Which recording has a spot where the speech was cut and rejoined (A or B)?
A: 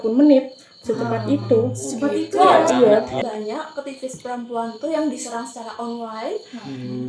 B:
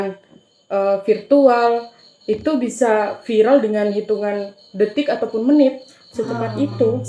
A